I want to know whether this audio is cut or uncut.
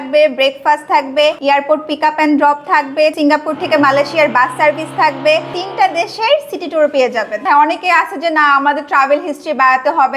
cut